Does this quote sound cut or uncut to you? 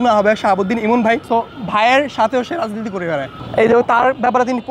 cut